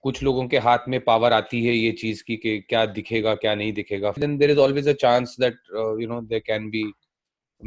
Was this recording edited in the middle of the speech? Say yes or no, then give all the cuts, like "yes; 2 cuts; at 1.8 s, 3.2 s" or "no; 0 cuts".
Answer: no; 0 cuts